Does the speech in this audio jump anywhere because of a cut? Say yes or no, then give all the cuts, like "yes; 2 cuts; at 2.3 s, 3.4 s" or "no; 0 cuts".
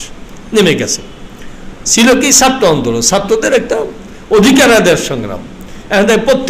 no; 0 cuts